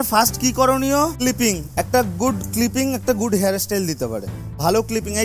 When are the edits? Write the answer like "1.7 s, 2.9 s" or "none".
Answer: 1.1 s